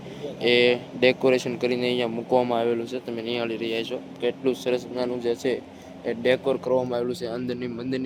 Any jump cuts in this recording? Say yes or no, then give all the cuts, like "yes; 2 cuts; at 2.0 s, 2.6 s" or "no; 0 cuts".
no; 0 cuts